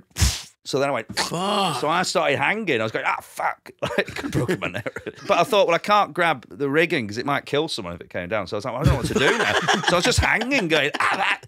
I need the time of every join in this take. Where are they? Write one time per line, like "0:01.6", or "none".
0:05.2
0:06.5
0:07.4